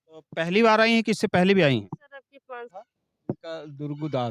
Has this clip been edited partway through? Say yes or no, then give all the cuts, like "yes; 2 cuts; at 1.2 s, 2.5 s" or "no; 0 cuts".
yes; 1 cut; at 2.7 s